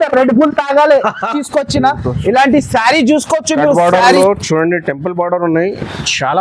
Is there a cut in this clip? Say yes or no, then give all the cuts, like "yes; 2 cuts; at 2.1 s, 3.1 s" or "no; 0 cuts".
yes; 1 cut; at 1.4 s